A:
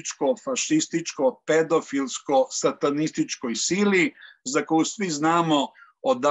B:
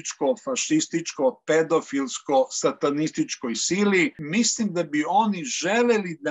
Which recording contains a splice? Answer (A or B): B